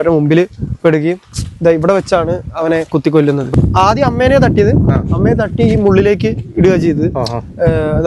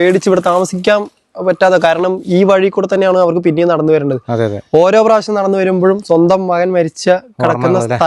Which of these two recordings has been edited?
first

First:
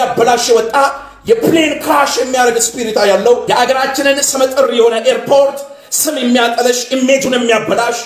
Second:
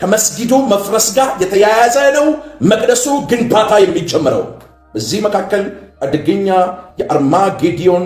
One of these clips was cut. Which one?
first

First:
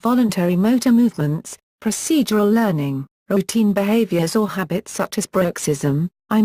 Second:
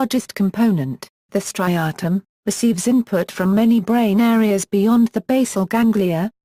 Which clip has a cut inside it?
second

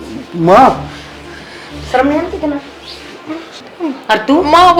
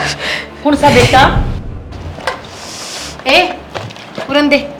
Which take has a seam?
second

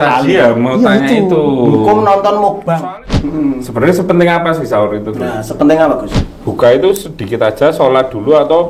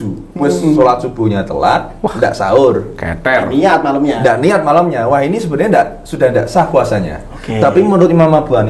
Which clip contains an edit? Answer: first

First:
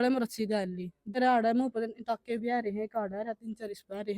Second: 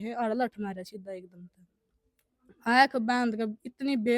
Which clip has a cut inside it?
first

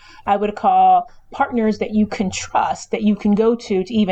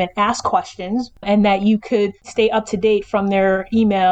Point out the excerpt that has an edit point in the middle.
second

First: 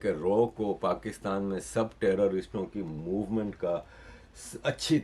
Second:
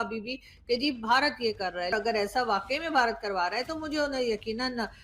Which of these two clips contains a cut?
second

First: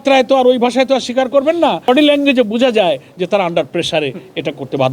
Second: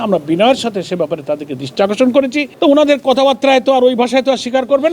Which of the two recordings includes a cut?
second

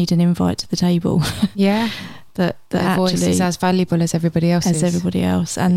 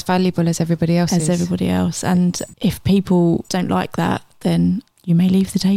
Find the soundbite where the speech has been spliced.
second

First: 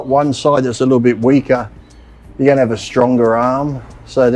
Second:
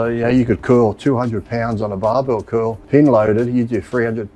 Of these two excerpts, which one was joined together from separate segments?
second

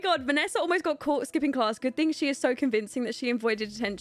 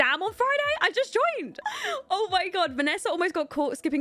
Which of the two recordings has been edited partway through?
second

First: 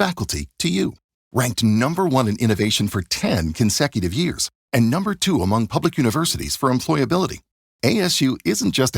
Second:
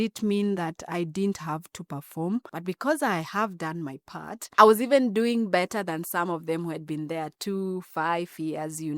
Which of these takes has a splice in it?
second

